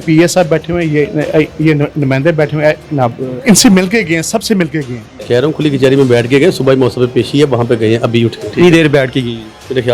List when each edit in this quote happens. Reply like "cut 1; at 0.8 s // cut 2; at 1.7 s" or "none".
cut 1; at 3.4 s // cut 2; at 5.1 s // cut 3; at 8.4 s